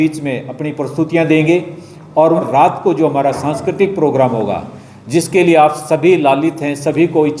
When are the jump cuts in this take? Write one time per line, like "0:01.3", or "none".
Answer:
0:02.3